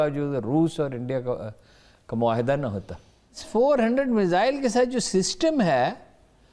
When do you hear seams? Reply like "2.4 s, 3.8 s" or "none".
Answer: 3.4 s

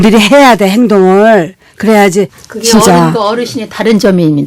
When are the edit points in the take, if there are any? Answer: 2.5 s

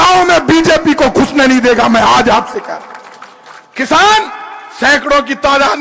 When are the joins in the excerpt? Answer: none

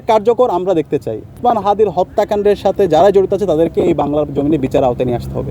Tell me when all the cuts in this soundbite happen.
1.3 s

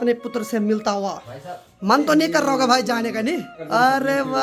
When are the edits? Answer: 1.8 s, 3.6 s

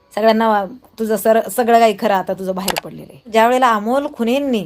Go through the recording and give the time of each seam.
3.3 s

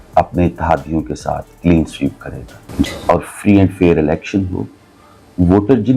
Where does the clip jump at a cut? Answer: 2.9 s

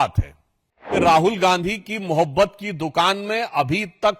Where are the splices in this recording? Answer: 1.0 s

